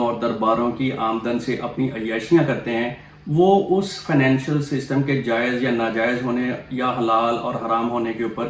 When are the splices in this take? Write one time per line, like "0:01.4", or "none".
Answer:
none